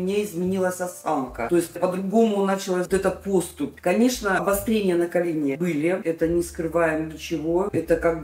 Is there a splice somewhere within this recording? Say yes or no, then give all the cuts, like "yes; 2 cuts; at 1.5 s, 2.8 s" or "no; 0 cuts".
no; 0 cuts